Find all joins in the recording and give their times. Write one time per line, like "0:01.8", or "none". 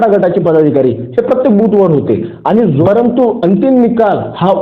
0:02.8